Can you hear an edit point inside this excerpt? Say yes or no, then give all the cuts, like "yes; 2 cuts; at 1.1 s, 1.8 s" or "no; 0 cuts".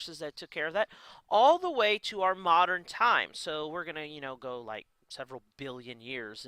no; 0 cuts